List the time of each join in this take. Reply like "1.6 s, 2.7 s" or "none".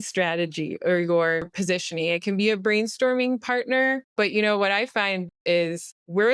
1.5 s, 4.1 s, 5.4 s